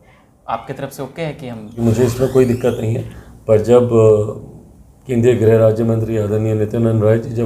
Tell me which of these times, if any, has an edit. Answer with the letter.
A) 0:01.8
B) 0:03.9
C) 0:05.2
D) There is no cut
A